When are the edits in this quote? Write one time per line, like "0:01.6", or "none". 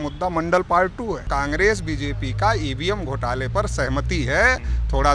0:01.2